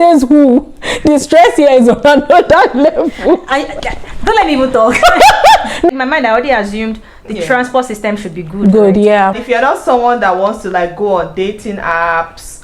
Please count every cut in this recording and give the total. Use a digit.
2